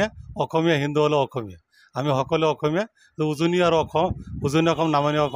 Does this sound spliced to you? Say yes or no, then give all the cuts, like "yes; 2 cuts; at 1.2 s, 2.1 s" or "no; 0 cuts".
no; 0 cuts